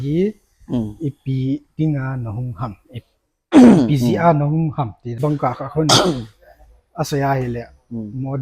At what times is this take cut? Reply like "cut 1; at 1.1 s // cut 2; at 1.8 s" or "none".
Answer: cut 1; at 5.2 s